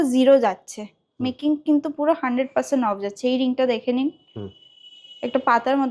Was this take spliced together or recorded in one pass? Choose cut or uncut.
uncut